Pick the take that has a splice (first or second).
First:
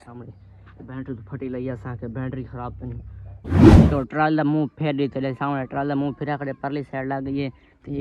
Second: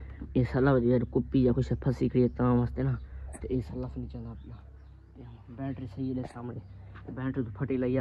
first